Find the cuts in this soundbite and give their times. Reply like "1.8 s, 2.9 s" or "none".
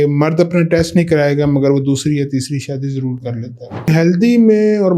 3.9 s